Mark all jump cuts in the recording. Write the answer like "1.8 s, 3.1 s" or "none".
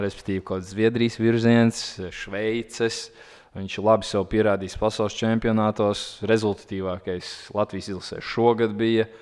none